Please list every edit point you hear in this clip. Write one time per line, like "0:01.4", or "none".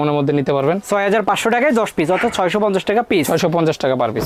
none

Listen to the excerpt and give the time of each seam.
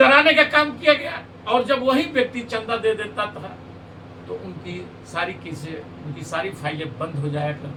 none

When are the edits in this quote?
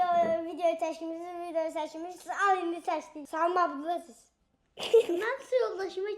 0:03.2

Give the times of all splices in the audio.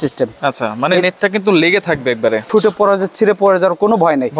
0:02.5

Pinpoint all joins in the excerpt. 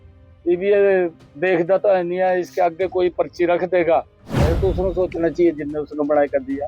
0:04.3

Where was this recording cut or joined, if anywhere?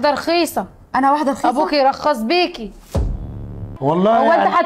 0:03.7

